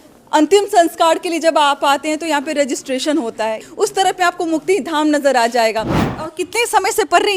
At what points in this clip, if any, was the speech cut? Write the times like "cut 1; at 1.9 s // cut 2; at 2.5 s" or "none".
cut 1; at 3.6 s // cut 2; at 6.0 s